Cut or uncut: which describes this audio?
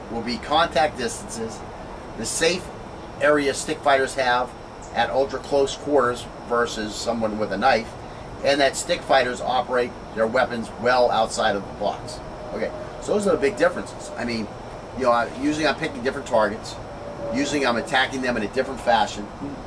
uncut